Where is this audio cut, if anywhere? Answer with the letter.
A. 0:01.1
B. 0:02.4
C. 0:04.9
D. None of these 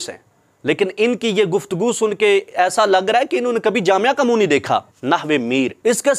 C